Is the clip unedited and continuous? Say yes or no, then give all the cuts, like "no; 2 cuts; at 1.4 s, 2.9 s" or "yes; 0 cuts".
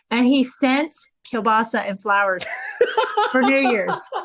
no; 1 cut; at 1.2 s